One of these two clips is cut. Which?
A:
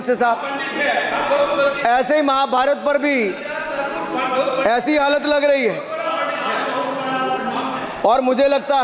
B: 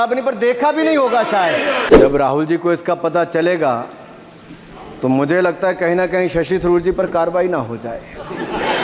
B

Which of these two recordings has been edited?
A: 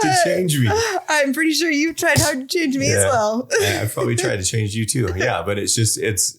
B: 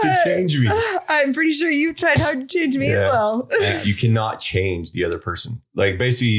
B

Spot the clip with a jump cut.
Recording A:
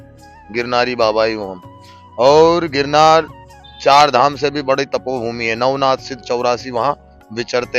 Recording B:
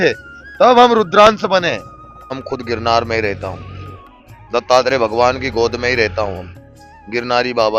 B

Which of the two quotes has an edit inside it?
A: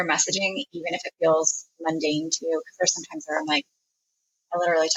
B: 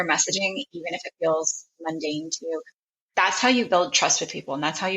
B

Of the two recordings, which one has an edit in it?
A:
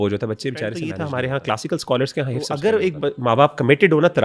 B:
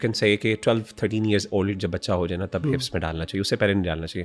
A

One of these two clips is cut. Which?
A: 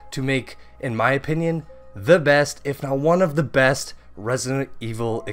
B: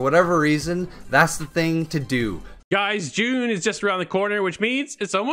B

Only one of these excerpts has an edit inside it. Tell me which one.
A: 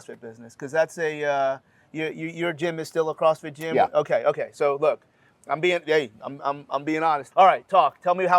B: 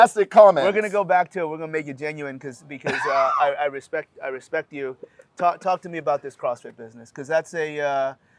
A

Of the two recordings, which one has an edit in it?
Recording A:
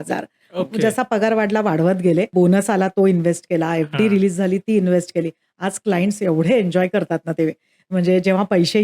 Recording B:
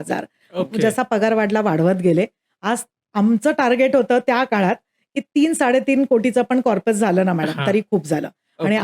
A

